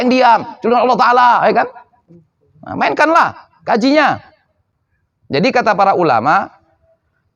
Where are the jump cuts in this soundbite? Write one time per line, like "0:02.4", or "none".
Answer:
none